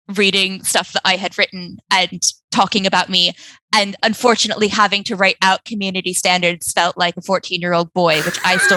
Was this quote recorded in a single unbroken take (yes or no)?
yes